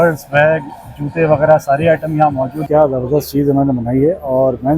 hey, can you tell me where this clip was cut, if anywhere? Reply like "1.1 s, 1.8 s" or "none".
2.6 s